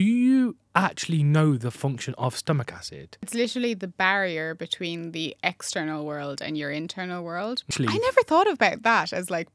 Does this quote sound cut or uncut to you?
cut